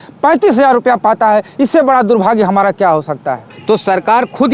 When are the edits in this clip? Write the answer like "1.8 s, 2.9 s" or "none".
3.5 s